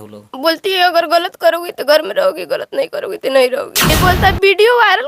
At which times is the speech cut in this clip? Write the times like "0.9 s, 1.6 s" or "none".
3.9 s